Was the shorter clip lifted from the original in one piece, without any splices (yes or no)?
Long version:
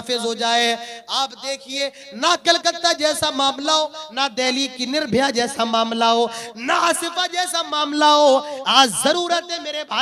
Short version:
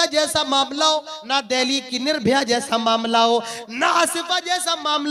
yes